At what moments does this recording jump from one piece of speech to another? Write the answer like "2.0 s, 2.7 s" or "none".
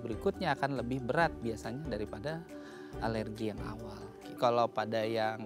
4.4 s